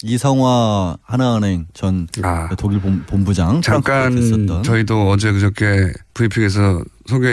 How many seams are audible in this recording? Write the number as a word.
one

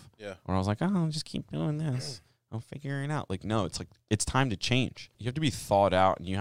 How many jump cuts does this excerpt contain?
one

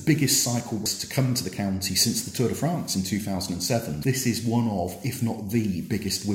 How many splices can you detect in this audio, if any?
one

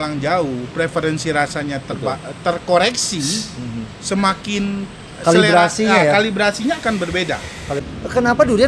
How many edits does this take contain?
one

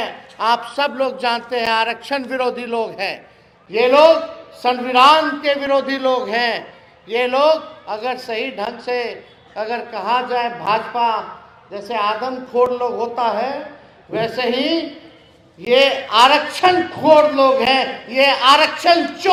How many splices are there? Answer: zero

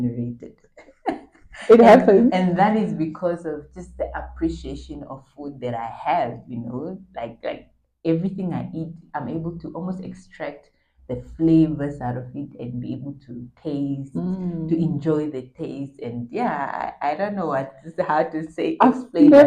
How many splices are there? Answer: zero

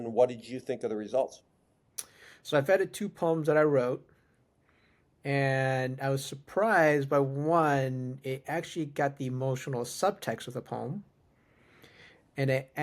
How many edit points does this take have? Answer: zero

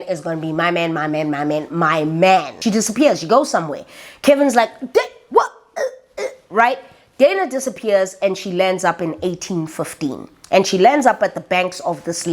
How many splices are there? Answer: one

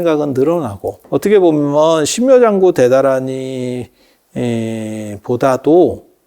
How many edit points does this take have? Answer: one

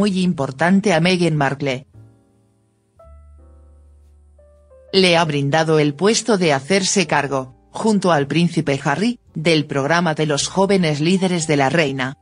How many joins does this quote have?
one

